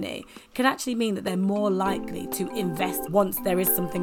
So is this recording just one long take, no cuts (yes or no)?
no